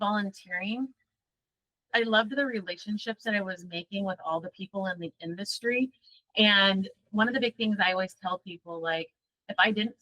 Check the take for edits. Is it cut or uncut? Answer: cut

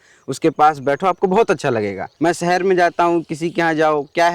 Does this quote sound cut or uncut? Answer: cut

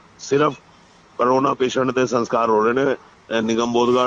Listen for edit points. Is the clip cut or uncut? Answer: uncut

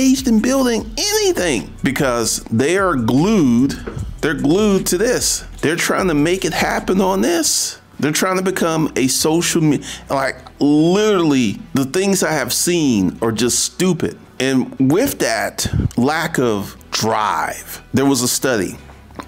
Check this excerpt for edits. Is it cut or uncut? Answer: uncut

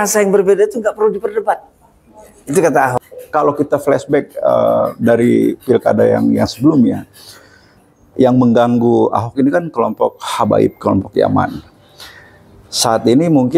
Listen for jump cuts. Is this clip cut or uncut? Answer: cut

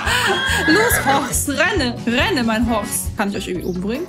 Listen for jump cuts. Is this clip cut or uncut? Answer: cut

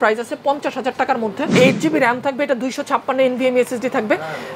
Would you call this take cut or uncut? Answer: cut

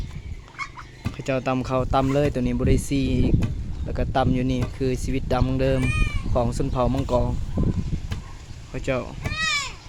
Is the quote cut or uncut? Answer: uncut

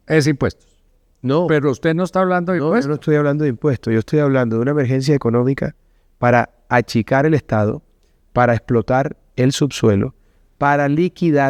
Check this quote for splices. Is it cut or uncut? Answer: uncut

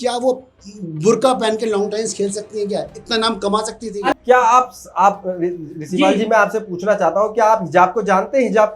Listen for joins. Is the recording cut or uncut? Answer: cut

